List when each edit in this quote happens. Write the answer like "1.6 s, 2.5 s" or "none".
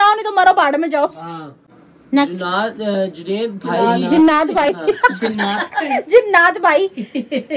1.5 s, 4.7 s